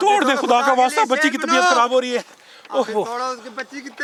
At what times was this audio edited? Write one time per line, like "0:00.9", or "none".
none